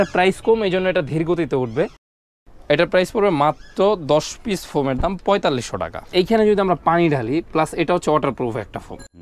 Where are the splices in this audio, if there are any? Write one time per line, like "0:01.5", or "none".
0:06.0